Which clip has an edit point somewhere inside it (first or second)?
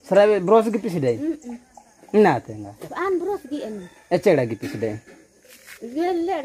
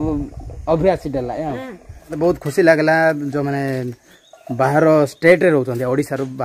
second